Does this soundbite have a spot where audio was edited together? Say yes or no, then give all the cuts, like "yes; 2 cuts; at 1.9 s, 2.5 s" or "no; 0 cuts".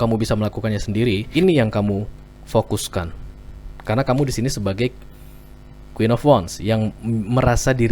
yes; 1 cut; at 1.2 s